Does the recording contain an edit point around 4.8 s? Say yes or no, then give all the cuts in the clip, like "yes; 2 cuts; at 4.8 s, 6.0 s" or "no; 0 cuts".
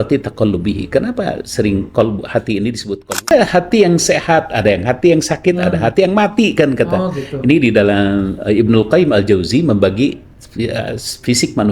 no; 1 cut; at 3.3 s